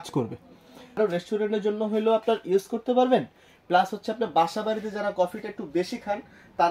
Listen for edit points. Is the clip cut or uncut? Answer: cut